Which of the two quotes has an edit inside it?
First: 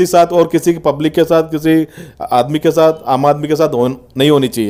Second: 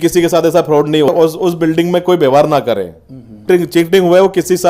second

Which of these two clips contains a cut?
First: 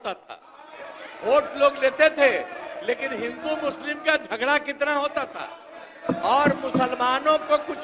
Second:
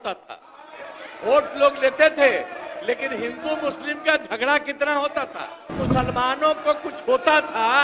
second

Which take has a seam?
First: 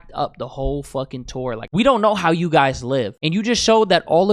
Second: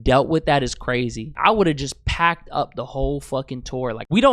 second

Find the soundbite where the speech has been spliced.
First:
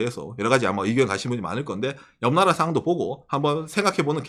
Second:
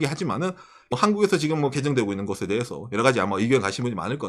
second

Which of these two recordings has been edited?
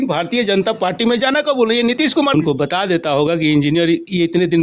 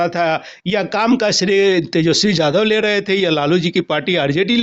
first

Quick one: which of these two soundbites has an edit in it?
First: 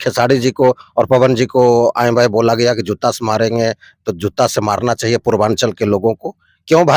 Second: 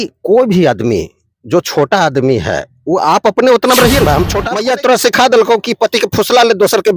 second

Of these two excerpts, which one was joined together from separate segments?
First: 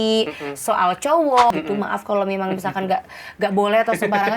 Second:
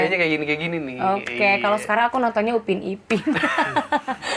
first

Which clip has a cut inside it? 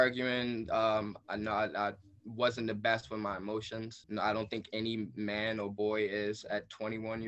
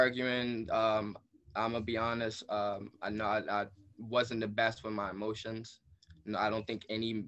first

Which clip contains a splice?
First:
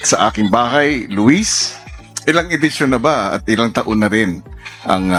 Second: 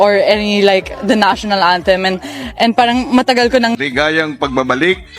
second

